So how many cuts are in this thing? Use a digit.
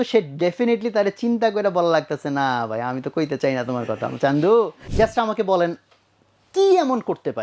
1